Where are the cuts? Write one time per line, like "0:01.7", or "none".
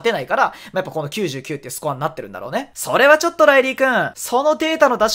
0:02.7